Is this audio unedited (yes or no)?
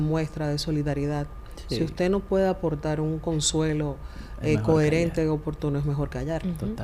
yes